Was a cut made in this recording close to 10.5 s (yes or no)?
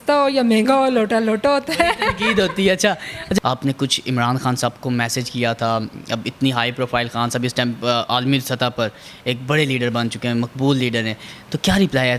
no